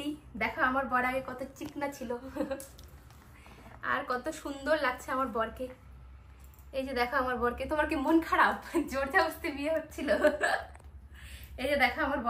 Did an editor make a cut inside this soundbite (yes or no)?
no